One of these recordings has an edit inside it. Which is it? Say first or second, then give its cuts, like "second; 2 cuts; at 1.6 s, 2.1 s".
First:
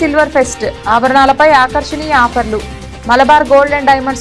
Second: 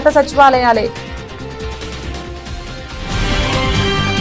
second; 1 cut; at 0.9 s